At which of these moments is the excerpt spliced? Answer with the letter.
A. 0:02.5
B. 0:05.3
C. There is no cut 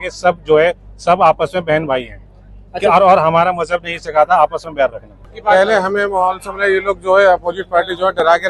B